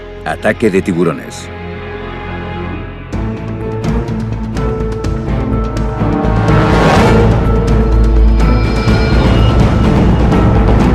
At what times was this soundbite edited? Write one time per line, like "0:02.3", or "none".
0:08.1

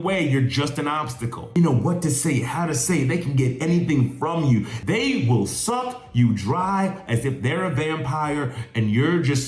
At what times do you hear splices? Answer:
0:01.6
0:04.8

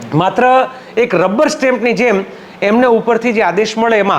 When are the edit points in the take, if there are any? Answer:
none

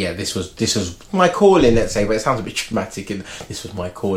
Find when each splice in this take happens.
0:01.0

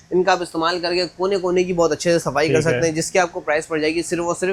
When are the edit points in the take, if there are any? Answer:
none

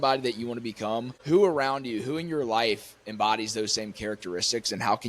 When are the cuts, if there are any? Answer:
0:01.1

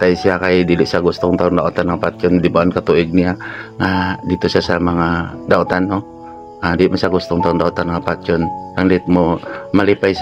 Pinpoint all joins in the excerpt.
none

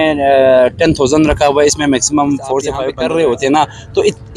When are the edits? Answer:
0:02.8

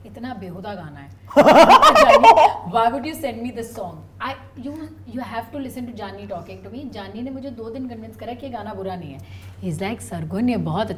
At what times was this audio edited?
none

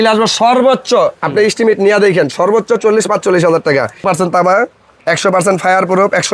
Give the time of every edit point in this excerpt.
0:04.0

